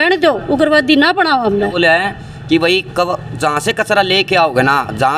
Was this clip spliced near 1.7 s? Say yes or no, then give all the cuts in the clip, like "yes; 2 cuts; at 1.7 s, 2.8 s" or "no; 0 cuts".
yes; 1 cut; at 1.7 s